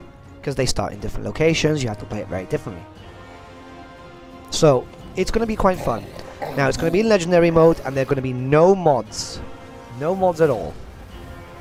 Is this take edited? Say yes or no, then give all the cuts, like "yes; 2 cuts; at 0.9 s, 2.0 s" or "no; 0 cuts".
no; 0 cuts